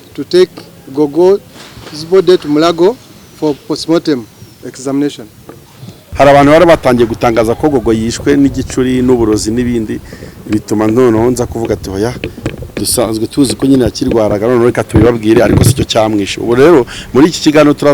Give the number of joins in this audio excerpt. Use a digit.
1